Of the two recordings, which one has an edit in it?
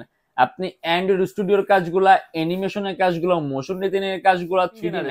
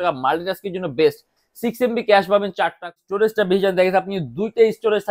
second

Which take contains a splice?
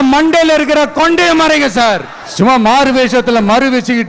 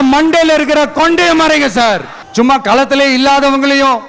second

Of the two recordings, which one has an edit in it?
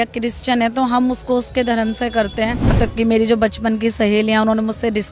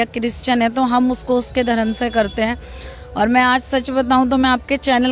first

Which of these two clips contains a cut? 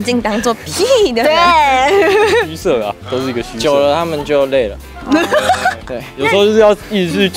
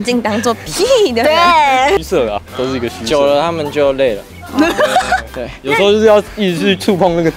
second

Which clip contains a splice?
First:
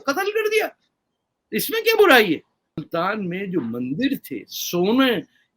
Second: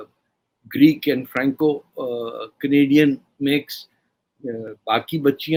first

